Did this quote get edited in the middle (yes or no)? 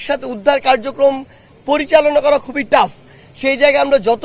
no